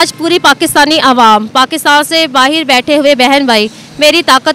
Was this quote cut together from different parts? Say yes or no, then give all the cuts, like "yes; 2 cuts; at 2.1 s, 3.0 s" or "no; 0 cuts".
no; 0 cuts